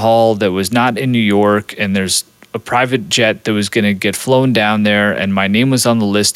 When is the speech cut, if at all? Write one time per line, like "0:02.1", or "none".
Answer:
none